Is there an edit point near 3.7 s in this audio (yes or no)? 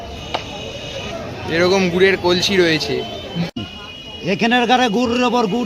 yes